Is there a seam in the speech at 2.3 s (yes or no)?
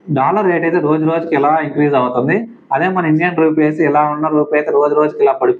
no